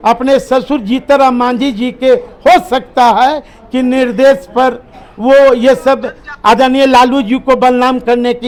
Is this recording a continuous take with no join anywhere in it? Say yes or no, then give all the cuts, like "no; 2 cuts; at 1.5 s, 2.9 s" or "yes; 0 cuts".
yes; 0 cuts